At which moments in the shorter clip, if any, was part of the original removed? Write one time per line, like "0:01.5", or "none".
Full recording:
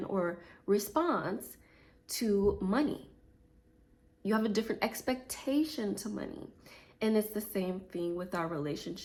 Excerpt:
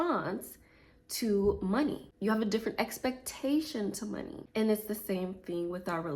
0:02.1
0:04.4